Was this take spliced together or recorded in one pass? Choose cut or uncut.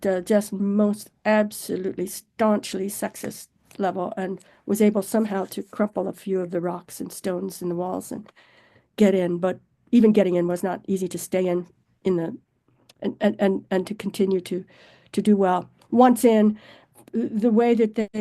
uncut